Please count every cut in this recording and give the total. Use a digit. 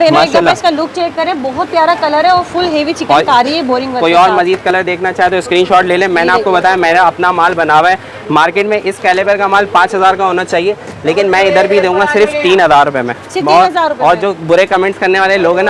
0